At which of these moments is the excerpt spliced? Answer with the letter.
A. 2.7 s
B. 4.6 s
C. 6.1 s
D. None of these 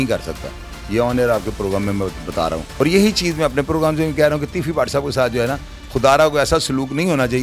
A